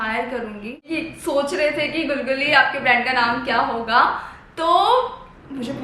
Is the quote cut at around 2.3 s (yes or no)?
no